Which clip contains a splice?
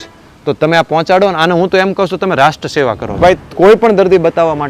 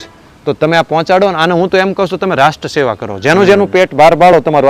first; 1 cut; at 3.2 s

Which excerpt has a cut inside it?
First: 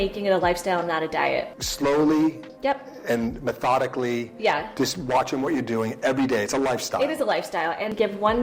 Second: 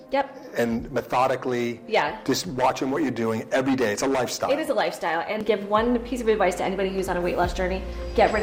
first; 1 cut; at 1.6 s

